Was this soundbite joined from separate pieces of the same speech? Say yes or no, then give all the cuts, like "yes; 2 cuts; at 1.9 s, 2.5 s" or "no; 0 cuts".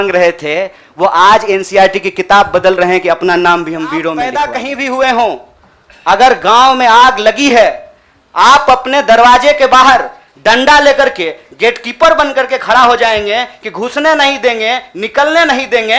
yes; 1 cut; at 4.2 s